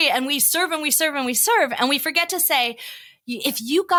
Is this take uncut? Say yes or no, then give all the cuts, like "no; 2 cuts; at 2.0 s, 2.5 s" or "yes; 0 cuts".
yes; 0 cuts